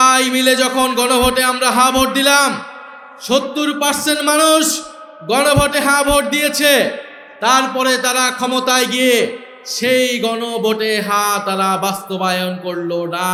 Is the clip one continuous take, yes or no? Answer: yes